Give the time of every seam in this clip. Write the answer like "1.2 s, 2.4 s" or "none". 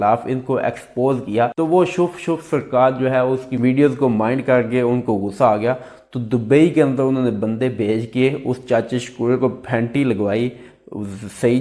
none